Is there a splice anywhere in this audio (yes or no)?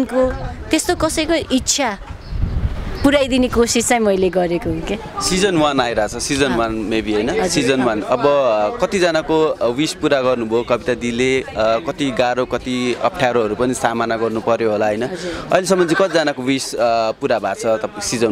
no